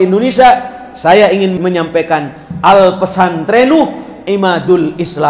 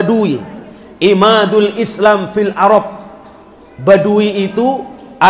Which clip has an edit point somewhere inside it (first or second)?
first